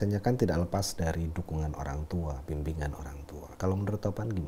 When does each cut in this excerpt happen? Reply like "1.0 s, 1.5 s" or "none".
3.5 s